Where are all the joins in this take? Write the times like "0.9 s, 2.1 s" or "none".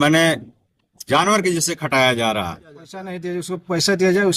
3.2 s